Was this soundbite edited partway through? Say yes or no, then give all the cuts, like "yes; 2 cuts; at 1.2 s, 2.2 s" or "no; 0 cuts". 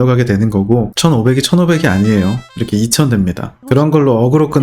yes; 1 cut; at 0.9 s